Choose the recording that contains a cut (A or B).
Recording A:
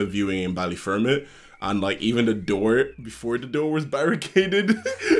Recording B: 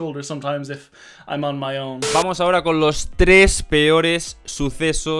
B